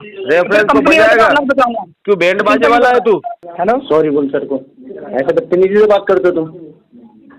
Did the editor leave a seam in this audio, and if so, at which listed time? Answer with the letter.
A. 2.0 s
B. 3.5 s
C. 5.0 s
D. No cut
B